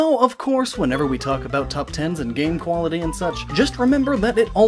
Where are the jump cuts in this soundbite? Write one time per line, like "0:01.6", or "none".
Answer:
0:01.9